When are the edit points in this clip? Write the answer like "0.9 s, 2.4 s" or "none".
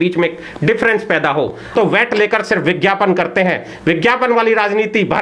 1.7 s